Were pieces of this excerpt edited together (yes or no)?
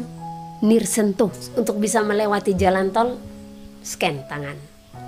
yes